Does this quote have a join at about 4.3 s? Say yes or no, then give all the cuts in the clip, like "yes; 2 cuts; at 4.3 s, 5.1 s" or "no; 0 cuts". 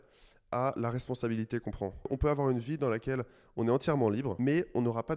yes; 2 cuts; at 2.1 s, 4.3 s